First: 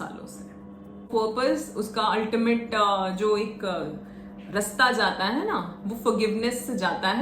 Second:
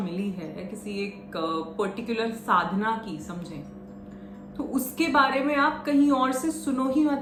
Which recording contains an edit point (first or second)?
first